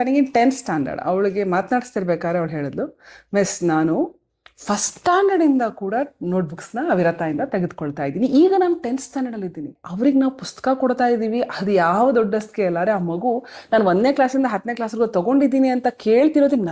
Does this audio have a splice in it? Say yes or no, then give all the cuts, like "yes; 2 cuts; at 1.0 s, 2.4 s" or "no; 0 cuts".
yes; 1 cut; at 9.8 s